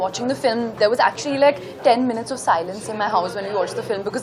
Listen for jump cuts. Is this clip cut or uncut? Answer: uncut